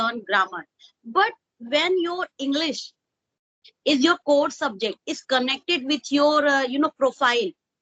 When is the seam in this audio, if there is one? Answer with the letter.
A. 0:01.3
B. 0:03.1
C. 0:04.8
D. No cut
D